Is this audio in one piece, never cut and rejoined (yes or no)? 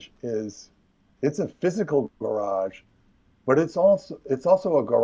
yes